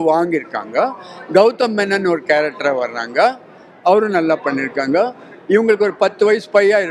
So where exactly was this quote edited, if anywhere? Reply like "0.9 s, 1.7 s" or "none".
none